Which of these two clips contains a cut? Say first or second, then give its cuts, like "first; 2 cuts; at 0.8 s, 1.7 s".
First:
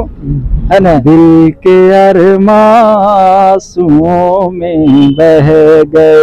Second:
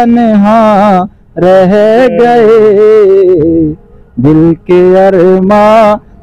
first; 1 cut; at 1.0 s